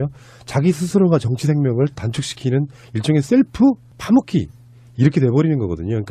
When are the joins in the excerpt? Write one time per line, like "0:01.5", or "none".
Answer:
none